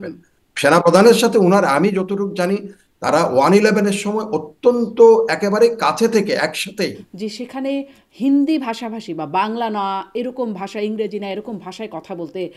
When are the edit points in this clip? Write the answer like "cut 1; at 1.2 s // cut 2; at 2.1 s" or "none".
cut 1; at 7.1 s

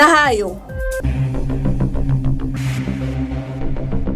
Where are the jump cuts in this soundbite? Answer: cut 1; at 1.0 s

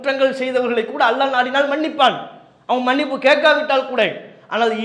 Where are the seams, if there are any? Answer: none

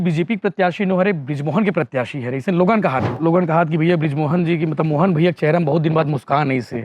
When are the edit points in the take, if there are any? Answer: cut 1; at 3.1 s

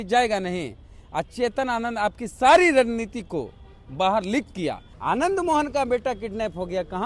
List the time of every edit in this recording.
cut 1; at 4.9 s

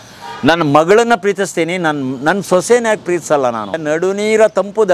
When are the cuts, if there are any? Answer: cut 1; at 3.8 s

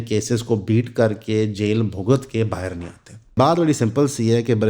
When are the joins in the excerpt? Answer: cut 1; at 3.4 s

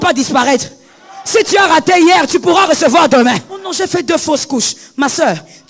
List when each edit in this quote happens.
cut 1; at 3.6 s

